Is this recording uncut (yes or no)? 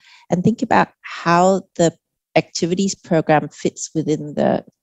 yes